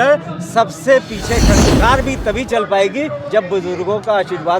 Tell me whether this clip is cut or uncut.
cut